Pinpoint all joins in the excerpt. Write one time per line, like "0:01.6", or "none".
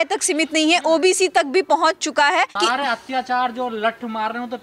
0:02.6